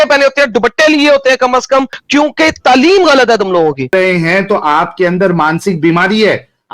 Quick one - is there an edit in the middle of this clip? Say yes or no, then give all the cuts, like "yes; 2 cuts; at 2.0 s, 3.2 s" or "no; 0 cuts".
yes; 2 cuts; at 2.0 s, 3.9 s